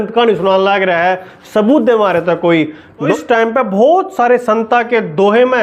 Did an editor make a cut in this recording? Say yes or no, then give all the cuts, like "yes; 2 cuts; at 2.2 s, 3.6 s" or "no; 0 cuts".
yes; 1 cut; at 2.9 s